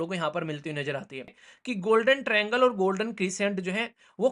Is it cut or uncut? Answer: cut